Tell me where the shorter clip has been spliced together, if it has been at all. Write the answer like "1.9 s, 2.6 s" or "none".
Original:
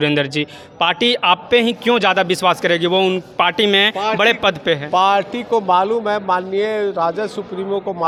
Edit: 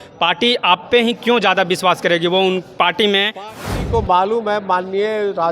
3.6 s